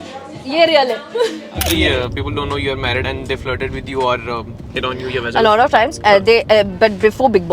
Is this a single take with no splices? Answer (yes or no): no